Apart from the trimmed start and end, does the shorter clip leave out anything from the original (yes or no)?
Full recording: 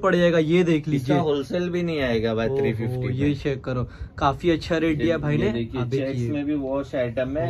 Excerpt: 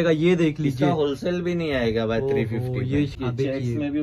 yes